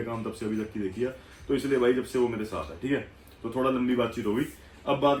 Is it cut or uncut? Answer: uncut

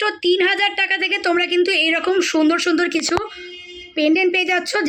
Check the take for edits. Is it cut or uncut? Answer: uncut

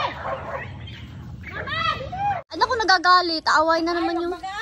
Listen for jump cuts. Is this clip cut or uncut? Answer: cut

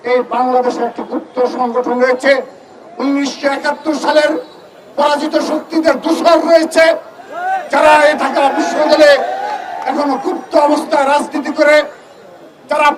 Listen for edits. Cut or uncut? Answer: uncut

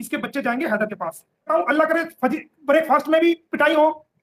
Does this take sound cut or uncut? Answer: cut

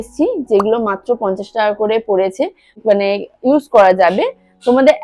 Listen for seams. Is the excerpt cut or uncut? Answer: uncut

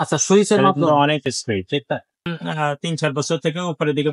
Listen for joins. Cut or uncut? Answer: cut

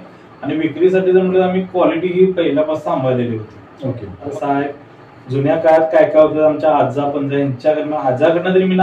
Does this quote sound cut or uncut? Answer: cut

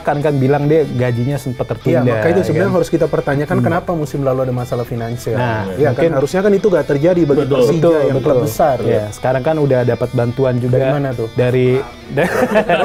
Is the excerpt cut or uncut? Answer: uncut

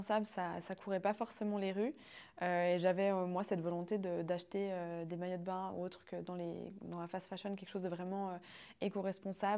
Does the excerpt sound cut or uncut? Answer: uncut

